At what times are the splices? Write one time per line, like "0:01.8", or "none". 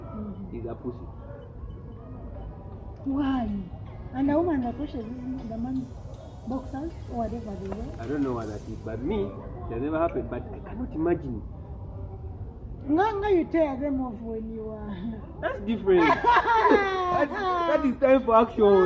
none